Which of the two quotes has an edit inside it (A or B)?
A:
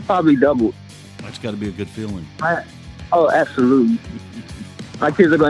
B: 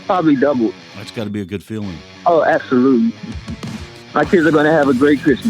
B